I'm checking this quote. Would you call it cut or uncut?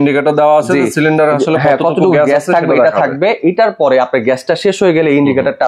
uncut